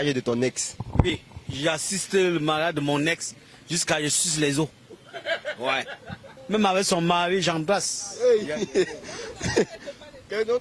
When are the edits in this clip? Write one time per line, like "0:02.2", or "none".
0:01.1
0:06.3